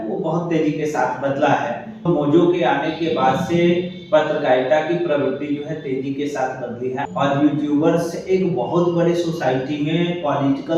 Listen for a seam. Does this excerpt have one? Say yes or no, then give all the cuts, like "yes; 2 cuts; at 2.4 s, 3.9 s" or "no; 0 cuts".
yes; 2 cuts; at 2.1 s, 7.0 s